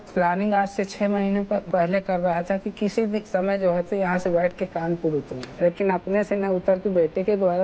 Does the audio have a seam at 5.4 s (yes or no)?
yes